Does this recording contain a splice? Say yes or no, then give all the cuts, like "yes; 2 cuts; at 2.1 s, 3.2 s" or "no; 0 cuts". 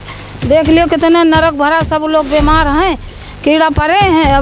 no; 0 cuts